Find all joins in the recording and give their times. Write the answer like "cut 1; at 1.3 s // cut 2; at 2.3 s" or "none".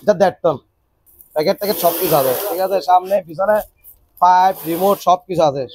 cut 1; at 1.0 s